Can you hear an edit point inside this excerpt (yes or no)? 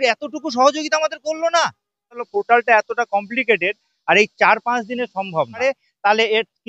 yes